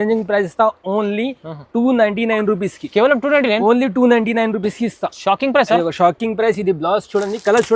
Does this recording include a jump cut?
no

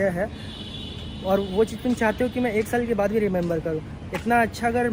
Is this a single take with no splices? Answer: yes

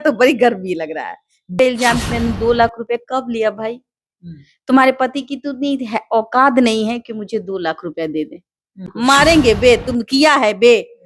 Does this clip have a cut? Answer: yes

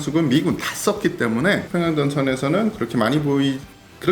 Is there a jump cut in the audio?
yes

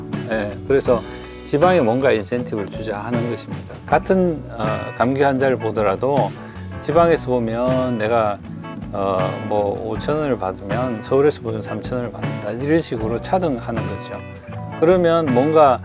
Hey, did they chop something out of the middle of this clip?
yes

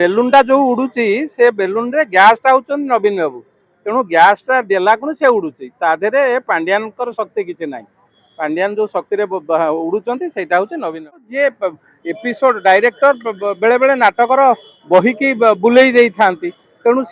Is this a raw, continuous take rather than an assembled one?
no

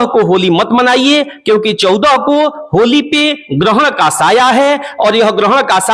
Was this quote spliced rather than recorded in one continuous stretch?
no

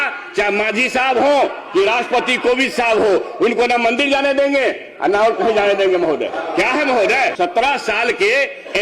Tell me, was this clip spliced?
yes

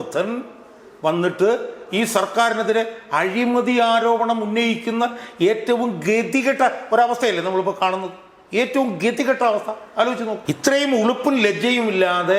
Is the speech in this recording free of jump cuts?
no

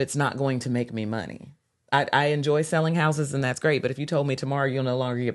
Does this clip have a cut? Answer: no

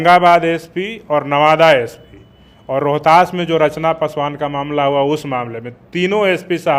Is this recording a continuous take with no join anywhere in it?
yes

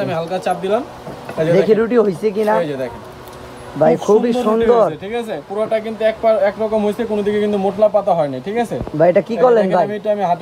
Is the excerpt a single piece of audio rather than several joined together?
yes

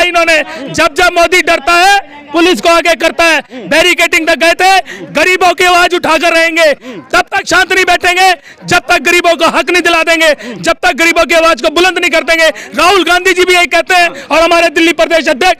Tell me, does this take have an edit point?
no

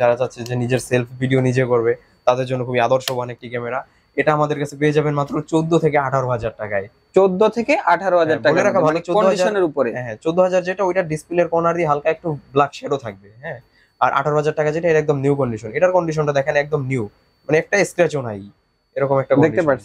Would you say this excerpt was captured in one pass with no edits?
yes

